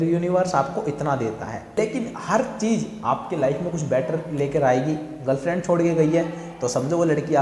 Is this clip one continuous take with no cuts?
no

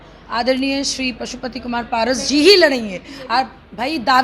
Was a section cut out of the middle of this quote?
no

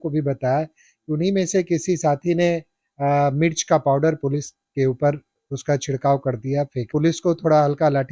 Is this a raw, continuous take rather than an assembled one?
no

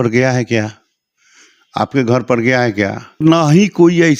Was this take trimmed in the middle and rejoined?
yes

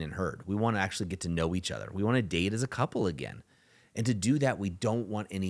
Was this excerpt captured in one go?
yes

